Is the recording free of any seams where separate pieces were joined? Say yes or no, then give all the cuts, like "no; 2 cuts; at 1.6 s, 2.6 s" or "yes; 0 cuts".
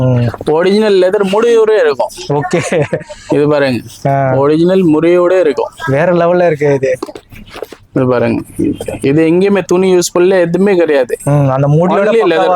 yes; 0 cuts